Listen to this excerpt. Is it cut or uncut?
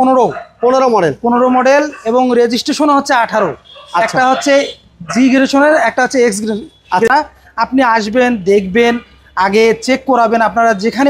cut